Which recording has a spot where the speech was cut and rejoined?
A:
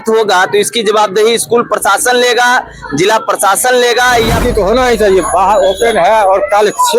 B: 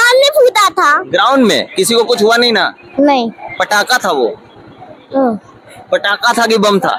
A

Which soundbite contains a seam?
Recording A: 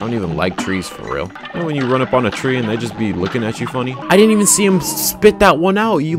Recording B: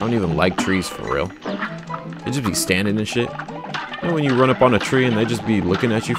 A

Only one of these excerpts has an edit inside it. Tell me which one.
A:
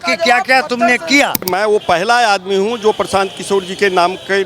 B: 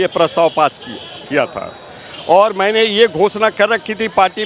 A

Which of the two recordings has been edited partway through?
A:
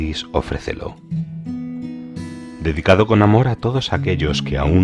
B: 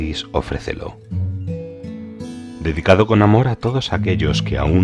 B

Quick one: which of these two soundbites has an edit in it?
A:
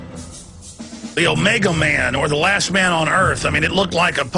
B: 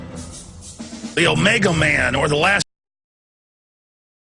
A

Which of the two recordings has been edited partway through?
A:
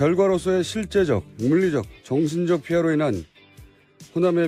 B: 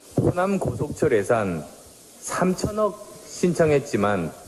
B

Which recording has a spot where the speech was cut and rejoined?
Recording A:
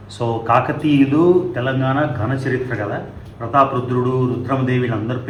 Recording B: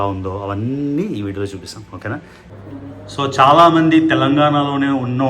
B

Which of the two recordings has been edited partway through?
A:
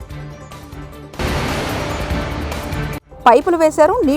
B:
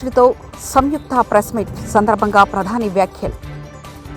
A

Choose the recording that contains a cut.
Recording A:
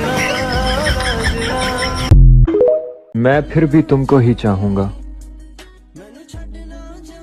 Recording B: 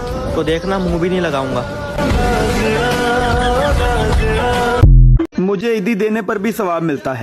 B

